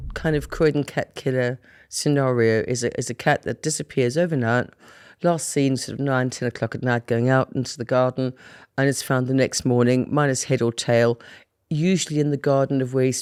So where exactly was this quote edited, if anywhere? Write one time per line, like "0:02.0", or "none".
none